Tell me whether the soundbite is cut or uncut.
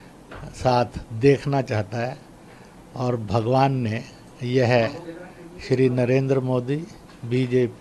uncut